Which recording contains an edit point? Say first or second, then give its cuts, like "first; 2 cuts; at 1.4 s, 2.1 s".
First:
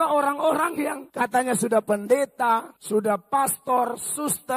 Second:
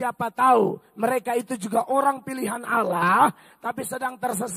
first; 2 cuts; at 1.0 s, 2.7 s